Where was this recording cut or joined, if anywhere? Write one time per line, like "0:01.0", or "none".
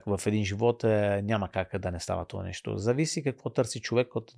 none